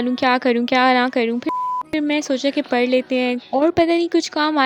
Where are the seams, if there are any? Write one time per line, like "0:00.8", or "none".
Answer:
none